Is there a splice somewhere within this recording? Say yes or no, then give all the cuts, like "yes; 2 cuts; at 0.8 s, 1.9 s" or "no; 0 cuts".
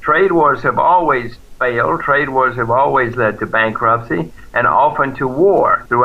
no; 0 cuts